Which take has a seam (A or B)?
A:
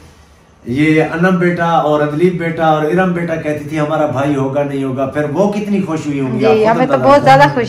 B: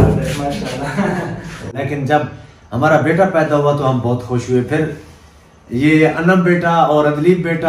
B